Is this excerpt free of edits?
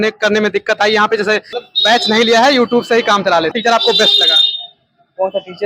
no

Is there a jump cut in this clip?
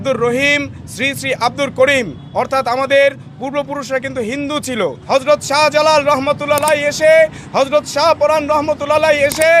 yes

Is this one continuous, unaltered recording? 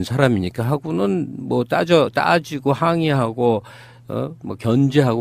no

